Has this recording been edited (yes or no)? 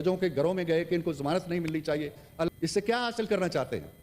yes